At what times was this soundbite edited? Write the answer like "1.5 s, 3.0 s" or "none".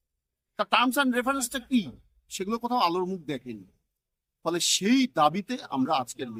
none